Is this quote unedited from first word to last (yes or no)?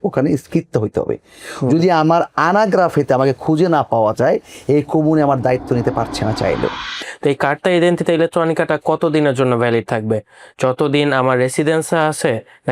no